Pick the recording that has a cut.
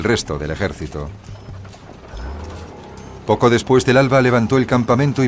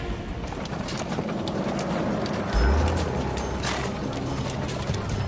second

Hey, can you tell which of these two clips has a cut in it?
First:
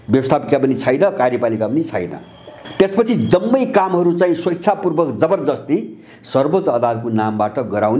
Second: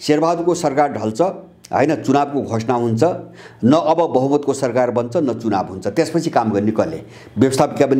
first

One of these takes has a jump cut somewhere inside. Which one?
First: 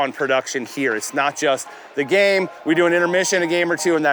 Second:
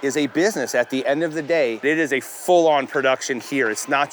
second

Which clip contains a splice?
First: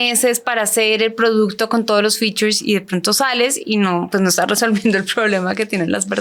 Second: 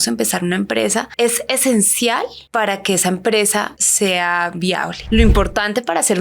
second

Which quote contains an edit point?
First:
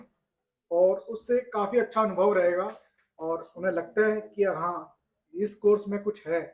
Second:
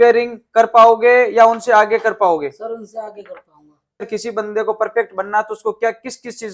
second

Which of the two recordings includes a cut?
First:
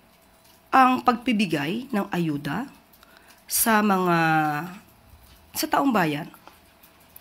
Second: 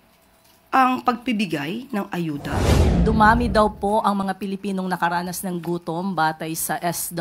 second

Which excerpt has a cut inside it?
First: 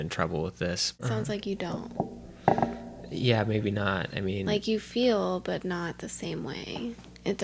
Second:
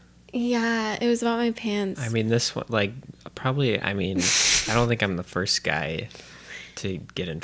first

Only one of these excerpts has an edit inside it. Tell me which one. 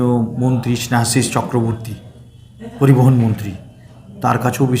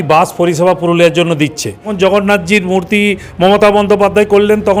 second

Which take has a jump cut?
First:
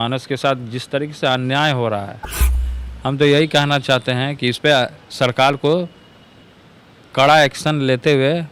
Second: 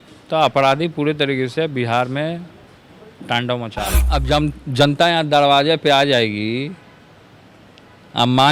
second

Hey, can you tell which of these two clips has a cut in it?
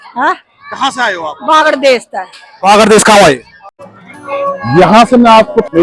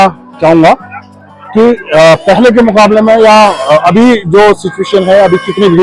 first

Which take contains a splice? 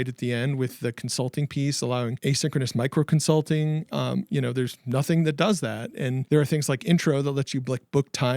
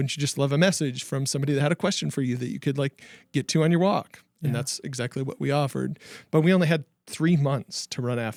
first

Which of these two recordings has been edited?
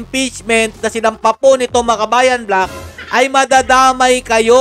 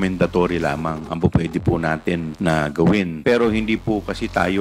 second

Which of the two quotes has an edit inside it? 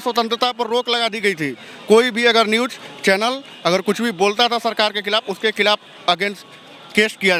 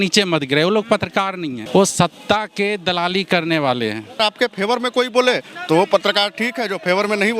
second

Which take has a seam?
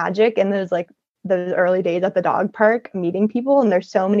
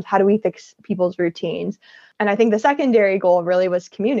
second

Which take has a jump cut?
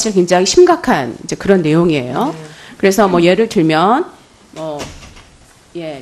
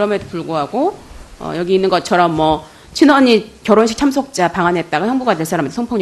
first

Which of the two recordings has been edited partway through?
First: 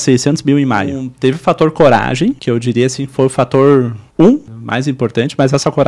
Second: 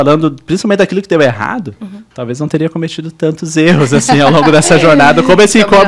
first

